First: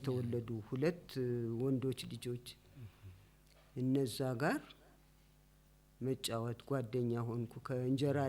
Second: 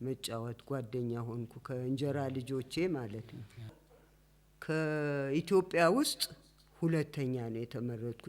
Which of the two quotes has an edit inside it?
second; 1 cut; at 3.8 s

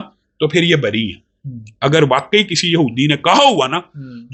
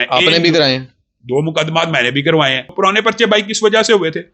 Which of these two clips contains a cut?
second; 1 cut; at 2.7 s

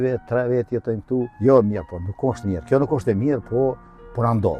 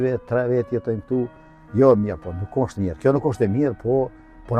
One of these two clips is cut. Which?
first; 1 cut; at 1.3 s

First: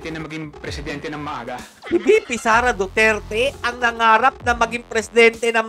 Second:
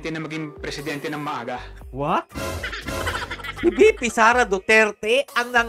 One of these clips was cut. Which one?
first; 1 cut; at 1.7 s

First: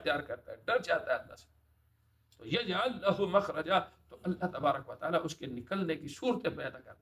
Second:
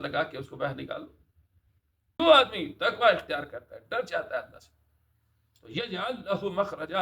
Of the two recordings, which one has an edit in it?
second; 1 cut; at 2.2 s

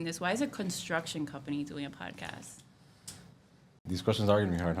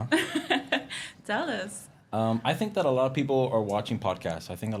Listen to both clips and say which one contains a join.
first; 1 cut; at 3.9 s

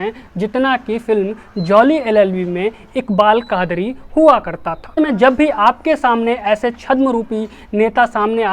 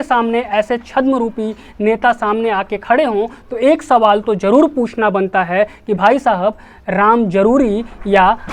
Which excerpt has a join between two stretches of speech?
first; 1 cut; at 5.0 s

